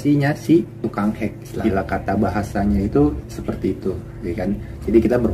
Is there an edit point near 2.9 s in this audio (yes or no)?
no